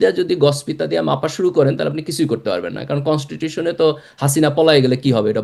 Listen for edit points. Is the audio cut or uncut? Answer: uncut